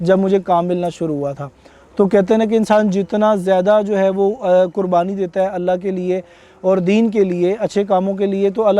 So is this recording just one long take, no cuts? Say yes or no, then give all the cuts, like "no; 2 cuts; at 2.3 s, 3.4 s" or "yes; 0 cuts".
yes; 0 cuts